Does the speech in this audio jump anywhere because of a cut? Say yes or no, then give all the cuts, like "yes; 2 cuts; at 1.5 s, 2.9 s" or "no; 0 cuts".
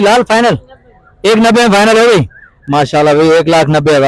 no; 0 cuts